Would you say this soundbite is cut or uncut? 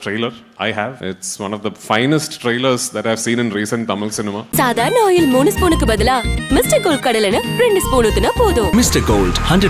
cut